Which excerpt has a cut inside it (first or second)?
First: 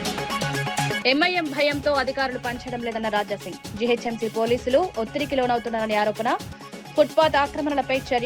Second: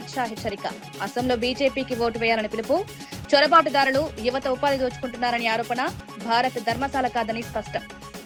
first